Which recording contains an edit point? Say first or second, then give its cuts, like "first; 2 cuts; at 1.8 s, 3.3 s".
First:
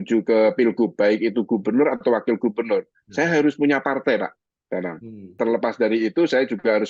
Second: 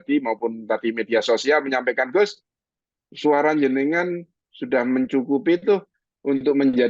first; 1 cut; at 5.4 s